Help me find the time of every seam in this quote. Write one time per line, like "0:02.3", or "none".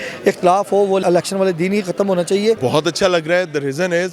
0:01.0
0:02.6